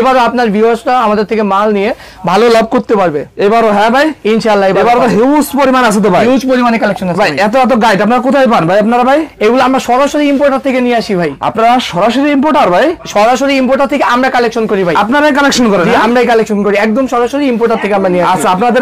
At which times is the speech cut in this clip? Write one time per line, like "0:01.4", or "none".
none